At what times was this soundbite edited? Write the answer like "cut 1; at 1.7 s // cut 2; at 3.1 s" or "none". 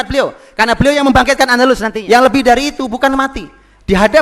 cut 1; at 1.9 s